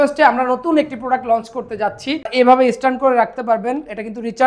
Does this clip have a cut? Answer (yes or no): yes